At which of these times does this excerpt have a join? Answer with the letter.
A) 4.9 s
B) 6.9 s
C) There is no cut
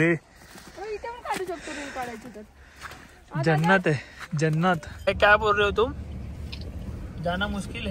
A